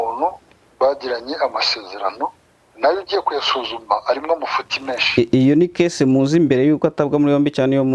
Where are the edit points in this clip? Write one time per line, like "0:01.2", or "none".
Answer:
none